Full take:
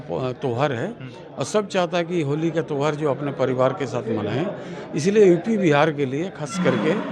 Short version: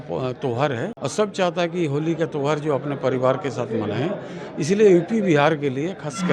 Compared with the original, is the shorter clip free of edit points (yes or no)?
no